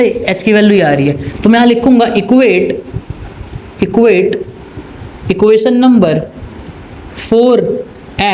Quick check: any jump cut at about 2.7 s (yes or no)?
no